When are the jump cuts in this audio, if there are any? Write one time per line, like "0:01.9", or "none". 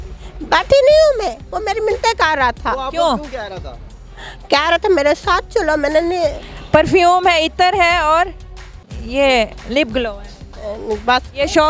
0:06.5